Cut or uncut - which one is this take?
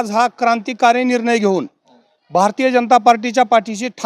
uncut